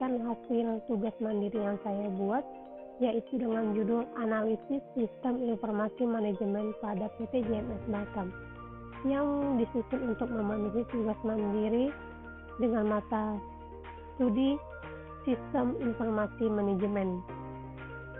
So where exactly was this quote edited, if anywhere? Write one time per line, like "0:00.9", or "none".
0:17.2